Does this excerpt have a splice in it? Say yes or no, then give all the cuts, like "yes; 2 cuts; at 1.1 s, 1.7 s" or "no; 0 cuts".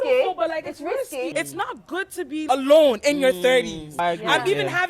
yes; 3 cuts; at 1.3 s, 2.5 s, 3.9 s